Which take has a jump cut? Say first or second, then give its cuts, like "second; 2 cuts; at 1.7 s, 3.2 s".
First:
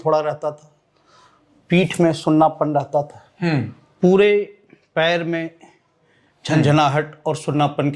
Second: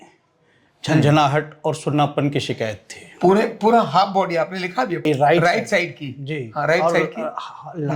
second; 1 cut; at 5.1 s